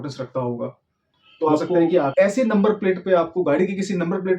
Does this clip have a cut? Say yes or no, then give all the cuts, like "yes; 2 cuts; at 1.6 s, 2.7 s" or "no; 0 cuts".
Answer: yes; 1 cut; at 2.1 s